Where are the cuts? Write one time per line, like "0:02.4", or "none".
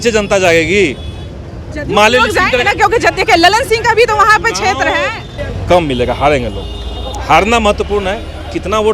0:05.3

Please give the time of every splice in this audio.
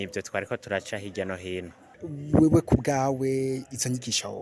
0:01.9

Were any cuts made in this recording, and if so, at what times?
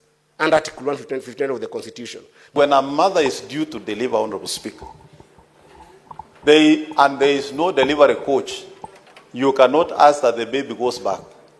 0:02.5

